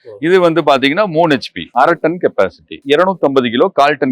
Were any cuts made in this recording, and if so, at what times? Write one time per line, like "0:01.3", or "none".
0:01.7
0:02.7